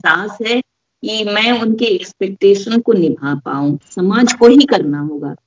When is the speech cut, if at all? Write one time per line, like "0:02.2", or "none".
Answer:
0:03.9